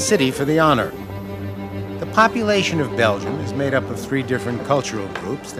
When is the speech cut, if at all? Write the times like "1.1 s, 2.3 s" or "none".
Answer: none